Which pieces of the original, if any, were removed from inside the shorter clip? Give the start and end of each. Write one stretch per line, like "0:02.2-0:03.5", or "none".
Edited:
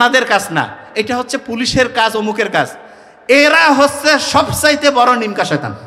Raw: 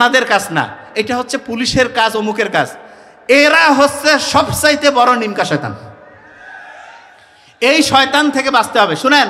none

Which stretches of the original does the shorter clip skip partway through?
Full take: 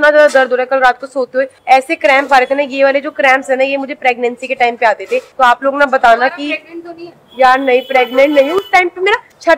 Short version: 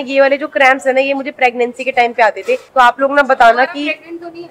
none

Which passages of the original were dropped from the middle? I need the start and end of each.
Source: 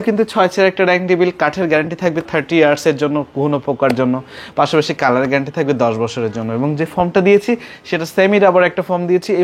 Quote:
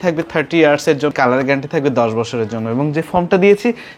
0:03.1-0:05.0

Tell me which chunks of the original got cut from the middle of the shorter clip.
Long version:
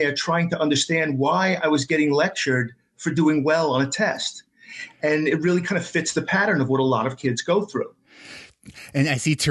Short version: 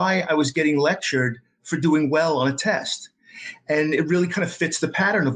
none

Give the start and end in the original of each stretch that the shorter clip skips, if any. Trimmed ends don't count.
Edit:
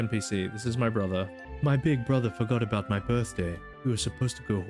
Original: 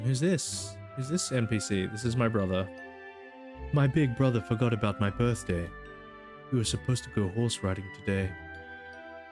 0:02.8-0:03.5
0:05.8-0:06.3

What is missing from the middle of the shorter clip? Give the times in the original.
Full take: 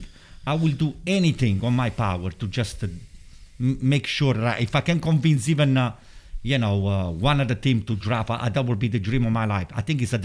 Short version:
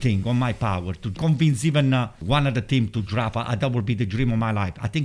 0:02.5-0:05.0
0:06.0-0:07.1

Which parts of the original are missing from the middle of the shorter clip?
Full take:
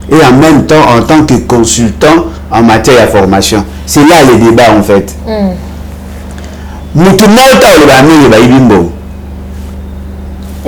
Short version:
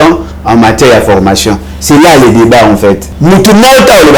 0:05.1-0:06.8

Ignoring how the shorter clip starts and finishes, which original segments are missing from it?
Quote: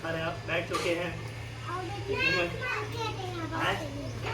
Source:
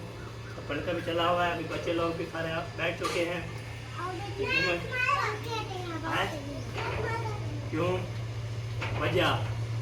0:05.0-0:05.2

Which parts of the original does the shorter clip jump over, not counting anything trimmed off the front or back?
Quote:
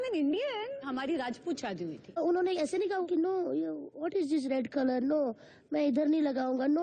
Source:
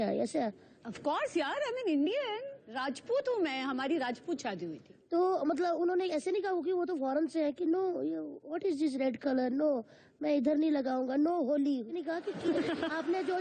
0:02.6-0:03.7
0:05.0-0:05.7
0:06.6-0:07.6

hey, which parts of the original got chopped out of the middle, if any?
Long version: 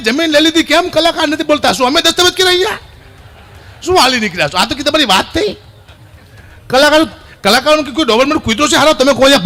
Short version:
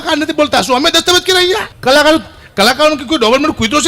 0:02.8-0:06.6

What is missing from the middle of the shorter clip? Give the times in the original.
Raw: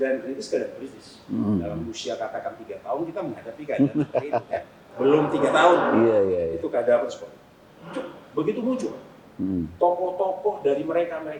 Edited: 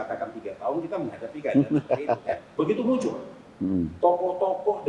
0:04.7-0:08.2

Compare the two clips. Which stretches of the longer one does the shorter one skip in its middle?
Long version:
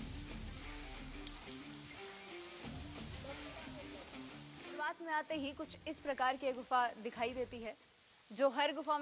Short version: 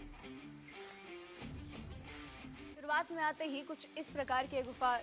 0:04.0-0:04.7

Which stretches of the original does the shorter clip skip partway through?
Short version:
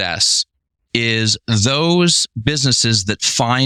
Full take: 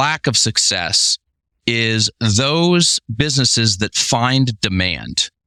none

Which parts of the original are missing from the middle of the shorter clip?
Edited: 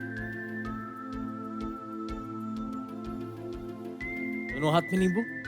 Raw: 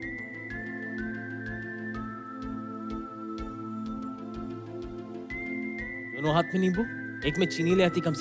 0:05.8-0:06.2

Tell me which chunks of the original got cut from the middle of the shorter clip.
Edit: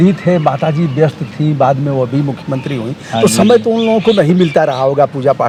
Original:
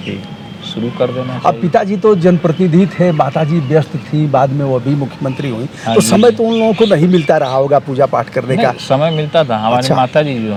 none

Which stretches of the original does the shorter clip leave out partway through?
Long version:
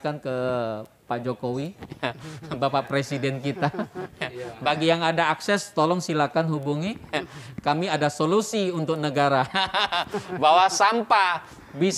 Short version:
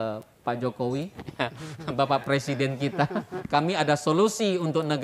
0:04.0-0:07.5

